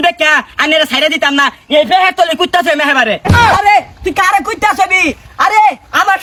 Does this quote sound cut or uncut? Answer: uncut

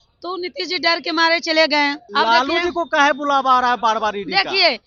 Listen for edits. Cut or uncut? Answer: cut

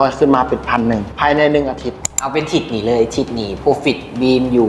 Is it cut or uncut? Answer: cut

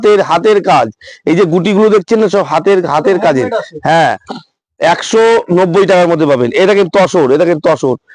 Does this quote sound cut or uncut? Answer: uncut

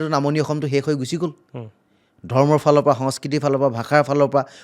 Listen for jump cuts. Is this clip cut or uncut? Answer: uncut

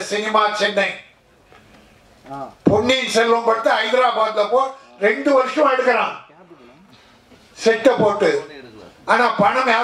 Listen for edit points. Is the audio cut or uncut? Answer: uncut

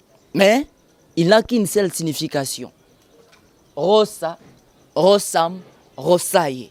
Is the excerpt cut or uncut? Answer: uncut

